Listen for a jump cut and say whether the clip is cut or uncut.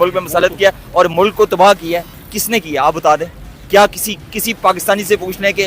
uncut